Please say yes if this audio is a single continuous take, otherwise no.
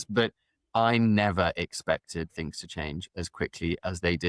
yes